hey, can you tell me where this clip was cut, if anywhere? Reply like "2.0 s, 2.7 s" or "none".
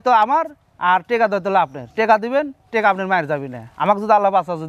none